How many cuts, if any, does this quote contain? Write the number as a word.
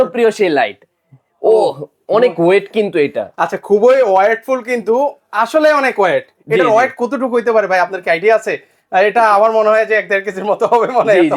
zero